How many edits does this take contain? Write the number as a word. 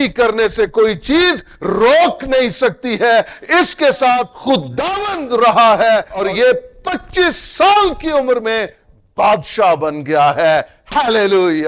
two